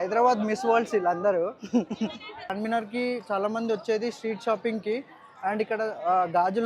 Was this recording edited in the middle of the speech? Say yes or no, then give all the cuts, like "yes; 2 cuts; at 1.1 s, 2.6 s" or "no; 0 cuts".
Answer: yes; 1 cut; at 2.5 s